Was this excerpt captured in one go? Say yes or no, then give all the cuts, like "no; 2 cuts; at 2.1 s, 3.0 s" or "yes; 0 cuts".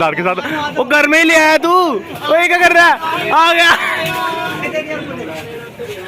no; 1 cut; at 4.7 s